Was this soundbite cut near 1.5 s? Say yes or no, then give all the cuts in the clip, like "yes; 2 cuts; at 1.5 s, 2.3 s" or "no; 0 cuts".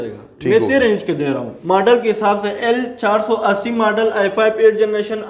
yes; 1 cut; at 1.5 s